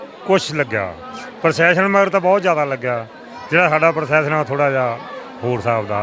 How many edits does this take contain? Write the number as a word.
zero